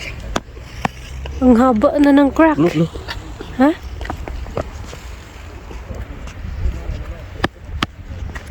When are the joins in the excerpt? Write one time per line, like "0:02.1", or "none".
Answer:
0:05.9

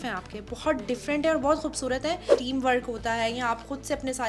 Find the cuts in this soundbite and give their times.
0:02.3

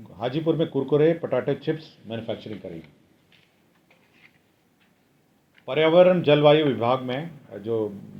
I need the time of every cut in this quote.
none

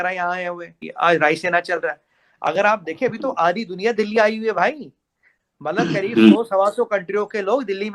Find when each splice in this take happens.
none

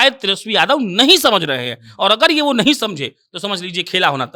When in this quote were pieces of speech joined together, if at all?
none

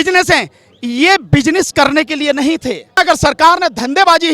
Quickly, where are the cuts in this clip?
0:02.9

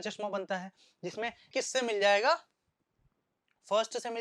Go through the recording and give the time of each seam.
0:01.5

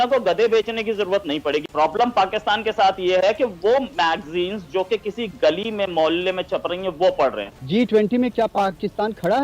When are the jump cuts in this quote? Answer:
0:01.6
0:07.5

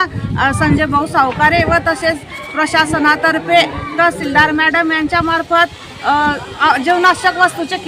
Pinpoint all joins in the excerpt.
none

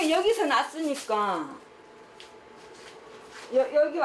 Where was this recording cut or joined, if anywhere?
none

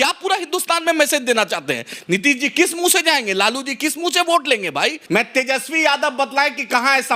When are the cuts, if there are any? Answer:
0:05.0

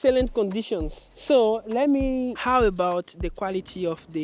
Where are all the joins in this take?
0:02.4

